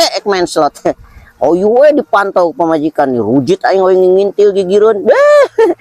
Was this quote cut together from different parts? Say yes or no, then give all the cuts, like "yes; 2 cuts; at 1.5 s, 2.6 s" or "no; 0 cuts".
no; 0 cuts